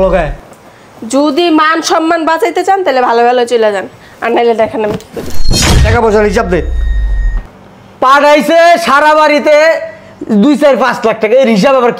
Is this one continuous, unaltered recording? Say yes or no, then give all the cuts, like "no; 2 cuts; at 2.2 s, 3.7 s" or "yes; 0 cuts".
no; 1 cut; at 5.6 s